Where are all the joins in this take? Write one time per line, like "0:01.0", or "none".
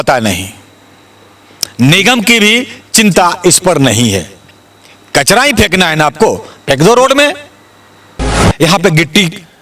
0:08.5